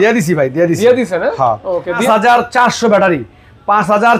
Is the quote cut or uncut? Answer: cut